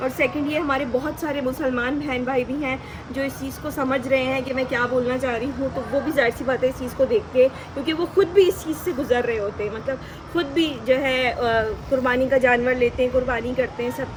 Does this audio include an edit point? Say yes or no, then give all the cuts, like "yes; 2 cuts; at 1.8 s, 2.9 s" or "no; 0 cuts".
no; 0 cuts